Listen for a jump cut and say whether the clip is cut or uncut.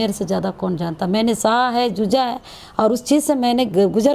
uncut